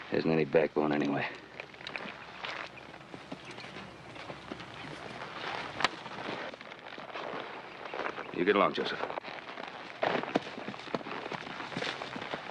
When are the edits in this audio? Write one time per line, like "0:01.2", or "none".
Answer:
0:04.7